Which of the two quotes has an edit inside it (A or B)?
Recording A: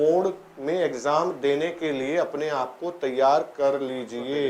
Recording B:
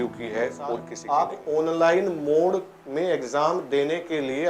B